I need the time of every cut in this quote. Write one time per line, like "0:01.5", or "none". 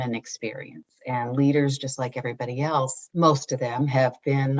0:03.0